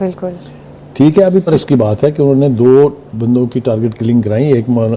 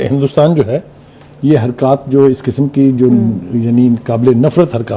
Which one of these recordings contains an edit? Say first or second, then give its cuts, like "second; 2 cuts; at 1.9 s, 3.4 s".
first; 1 cut; at 1.5 s